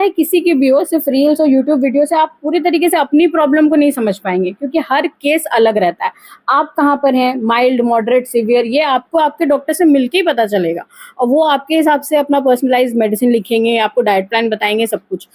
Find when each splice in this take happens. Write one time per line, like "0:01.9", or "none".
none